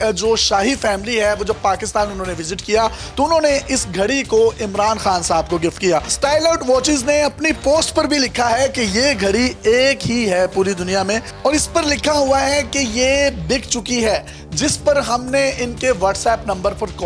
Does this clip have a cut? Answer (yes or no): no